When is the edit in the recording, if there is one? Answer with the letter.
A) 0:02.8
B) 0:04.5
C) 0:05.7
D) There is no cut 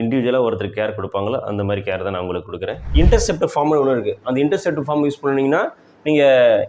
A